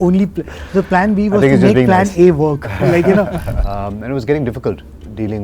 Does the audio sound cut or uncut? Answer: cut